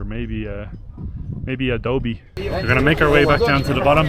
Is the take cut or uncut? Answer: cut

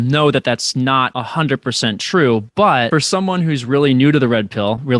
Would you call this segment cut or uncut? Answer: cut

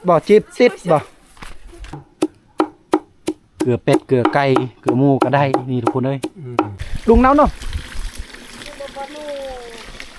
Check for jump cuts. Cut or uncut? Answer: cut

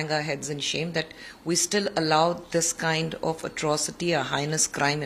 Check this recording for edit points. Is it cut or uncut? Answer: uncut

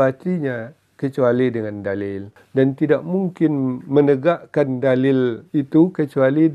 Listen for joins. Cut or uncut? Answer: cut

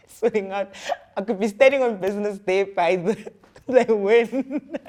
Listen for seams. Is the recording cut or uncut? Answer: uncut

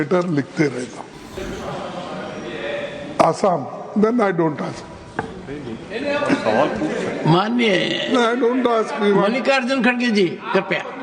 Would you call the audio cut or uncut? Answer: cut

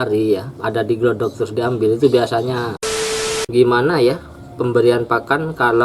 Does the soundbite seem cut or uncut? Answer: cut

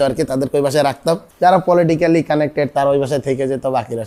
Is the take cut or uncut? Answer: uncut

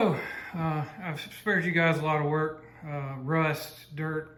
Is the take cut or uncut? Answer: uncut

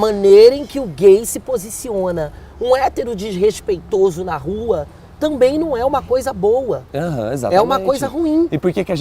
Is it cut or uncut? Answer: cut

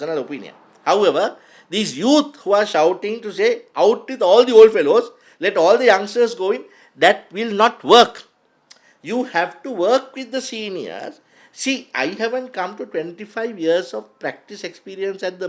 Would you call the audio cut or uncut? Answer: uncut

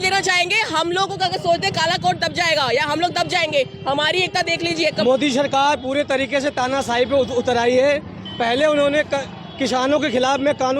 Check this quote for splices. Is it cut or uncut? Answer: cut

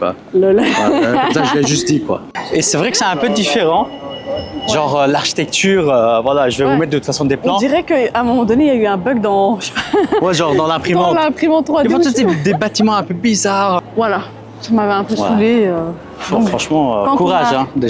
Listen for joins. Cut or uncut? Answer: cut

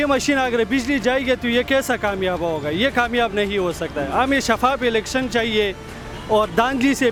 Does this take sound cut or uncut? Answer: uncut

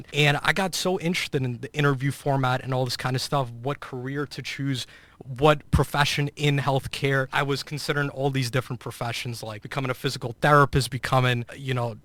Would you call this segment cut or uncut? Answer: uncut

